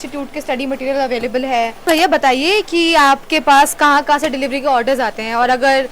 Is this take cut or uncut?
cut